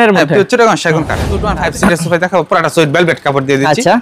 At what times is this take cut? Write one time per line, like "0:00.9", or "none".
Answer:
0:01.4